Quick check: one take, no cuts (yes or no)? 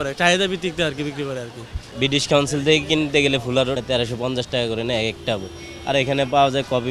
no